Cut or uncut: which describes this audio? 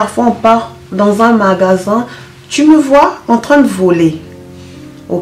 uncut